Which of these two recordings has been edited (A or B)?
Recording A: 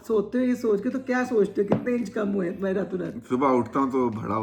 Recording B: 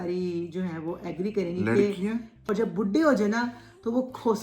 B